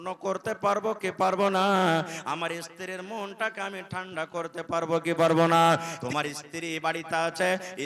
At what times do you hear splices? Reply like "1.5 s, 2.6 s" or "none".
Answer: 6.0 s